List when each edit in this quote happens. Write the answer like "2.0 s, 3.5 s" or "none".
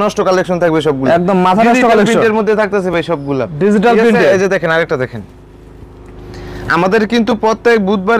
none